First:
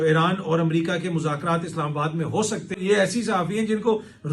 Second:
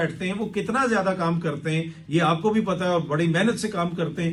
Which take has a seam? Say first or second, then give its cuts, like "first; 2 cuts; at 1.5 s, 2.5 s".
first; 1 cut; at 2.8 s